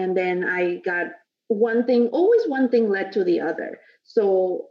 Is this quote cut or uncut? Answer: uncut